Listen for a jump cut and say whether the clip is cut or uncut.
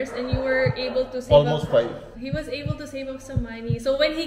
cut